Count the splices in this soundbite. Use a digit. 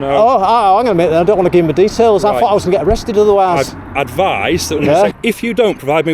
1